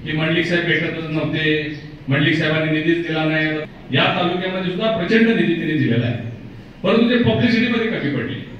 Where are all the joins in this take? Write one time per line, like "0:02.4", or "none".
0:03.7